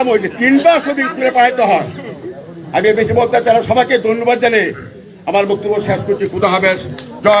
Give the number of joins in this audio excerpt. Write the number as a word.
zero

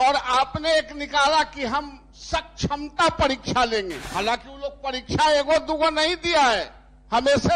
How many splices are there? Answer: one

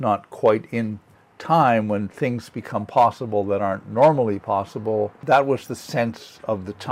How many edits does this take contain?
one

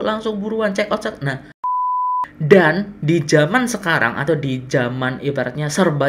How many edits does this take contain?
one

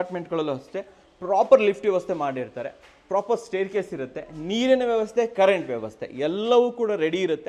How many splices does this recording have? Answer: zero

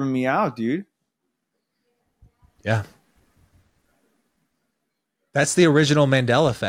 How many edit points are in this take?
zero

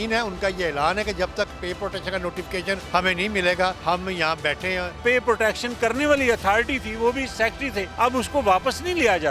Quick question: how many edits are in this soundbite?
four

